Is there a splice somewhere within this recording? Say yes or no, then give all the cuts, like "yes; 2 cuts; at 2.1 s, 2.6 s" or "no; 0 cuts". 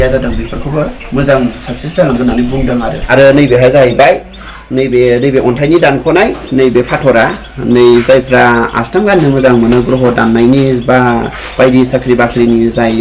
yes; 1 cut; at 3.0 s